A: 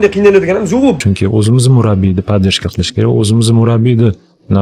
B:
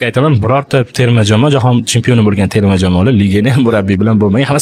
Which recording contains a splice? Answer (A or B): A